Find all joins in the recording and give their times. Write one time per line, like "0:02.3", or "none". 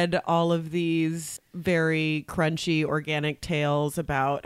0:01.4